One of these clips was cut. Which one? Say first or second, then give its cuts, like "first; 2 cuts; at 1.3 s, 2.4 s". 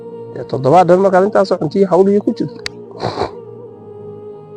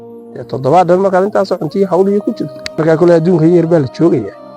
second; 1 cut; at 2.8 s